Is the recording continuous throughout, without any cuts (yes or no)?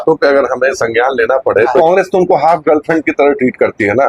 no